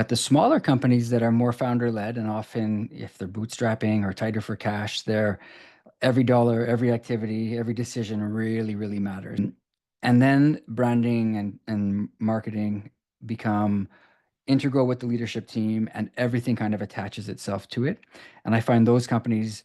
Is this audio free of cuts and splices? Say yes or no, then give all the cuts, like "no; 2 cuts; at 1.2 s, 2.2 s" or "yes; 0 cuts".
no; 1 cut; at 9.4 s